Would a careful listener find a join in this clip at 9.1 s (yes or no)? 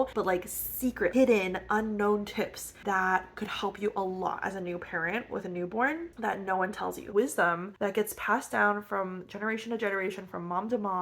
no